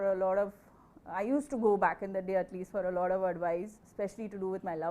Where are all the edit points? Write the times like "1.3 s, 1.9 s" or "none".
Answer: 3.8 s